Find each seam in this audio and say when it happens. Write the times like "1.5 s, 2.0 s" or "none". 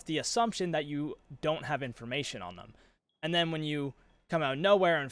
none

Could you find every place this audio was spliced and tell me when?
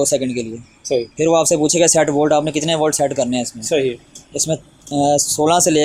none

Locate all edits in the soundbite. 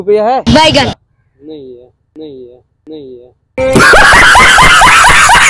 none

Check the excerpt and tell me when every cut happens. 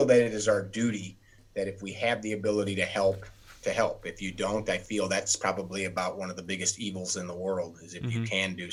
none

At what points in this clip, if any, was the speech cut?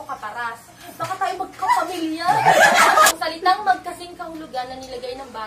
3.2 s

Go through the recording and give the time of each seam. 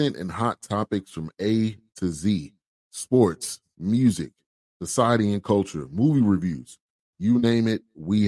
none

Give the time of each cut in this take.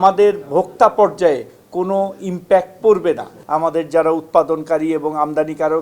3.3 s

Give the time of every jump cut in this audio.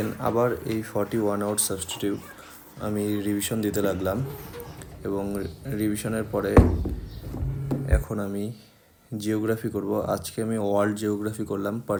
none

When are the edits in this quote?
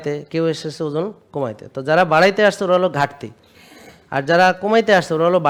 none

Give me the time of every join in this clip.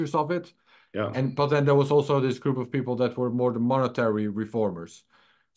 none

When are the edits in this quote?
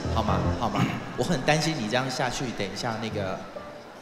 none

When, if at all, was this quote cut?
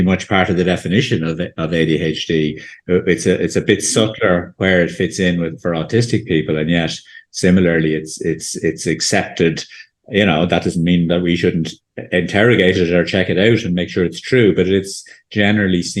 none

